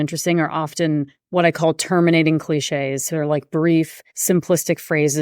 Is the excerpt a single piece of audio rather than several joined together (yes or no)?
no